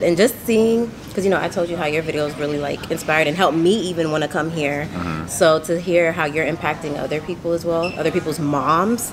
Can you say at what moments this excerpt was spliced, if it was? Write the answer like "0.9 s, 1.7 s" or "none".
none